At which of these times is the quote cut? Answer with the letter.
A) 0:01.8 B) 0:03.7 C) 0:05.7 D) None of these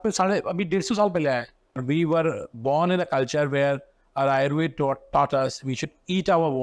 A